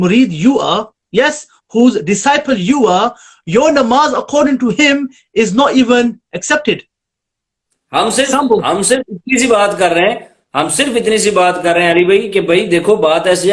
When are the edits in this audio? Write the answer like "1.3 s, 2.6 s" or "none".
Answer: none

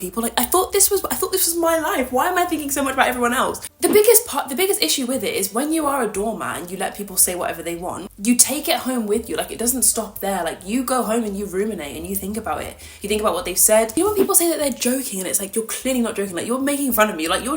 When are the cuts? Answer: 3.7 s, 13.9 s

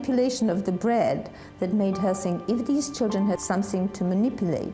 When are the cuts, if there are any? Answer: 3.4 s

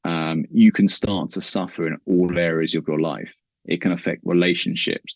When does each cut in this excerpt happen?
none

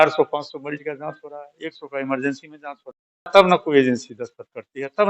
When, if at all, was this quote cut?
3.3 s

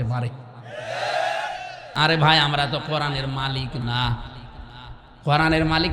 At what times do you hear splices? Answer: 1.9 s

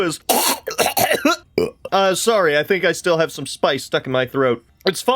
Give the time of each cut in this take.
1.8 s

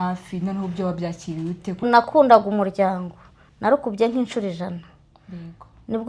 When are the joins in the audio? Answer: 1.8 s

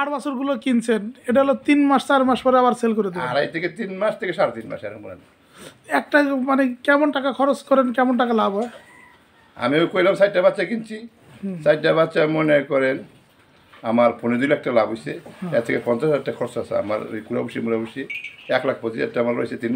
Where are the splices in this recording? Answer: none

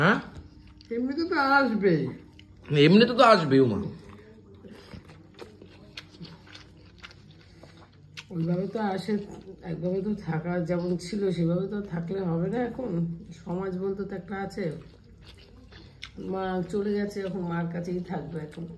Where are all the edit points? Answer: none

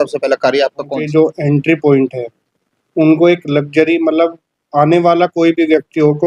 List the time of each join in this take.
1.1 s

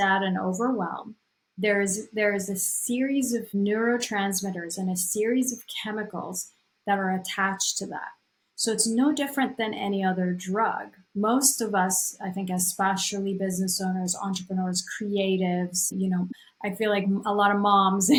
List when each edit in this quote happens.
none

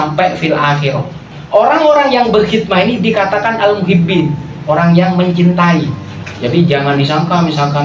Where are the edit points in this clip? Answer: 1.3 s

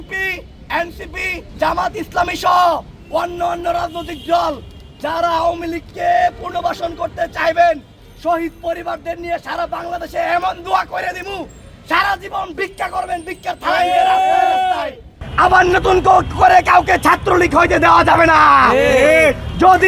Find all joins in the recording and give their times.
1.5 s, 15.2 s

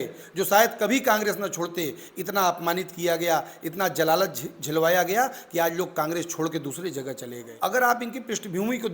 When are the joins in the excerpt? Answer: 7.5 s

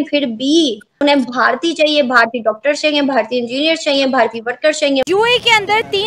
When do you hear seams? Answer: 5.1 s

